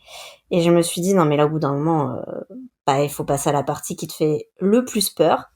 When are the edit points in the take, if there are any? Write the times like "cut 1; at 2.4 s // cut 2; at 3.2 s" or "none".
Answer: none